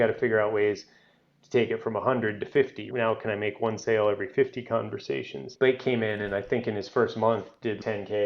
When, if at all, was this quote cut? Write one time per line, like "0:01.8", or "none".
0:02.8
0:05.5